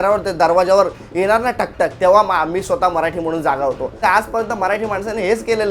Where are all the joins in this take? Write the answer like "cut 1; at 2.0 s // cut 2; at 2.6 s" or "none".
cut 1; at 4.0 s